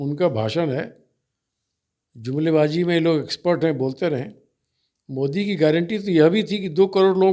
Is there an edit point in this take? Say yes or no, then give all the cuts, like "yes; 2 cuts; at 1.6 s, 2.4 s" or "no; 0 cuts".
no; 0 cuts